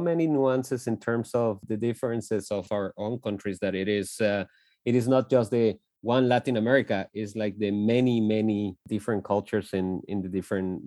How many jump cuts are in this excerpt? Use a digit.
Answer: 3